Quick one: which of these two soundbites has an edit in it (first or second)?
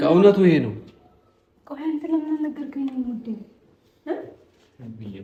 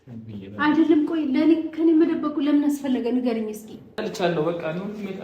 second